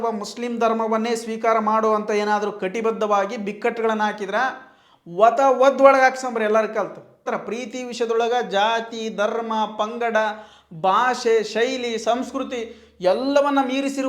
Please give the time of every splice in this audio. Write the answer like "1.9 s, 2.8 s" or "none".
7.3 s